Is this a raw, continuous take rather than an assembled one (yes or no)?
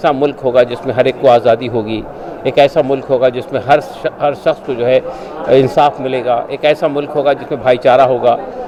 yes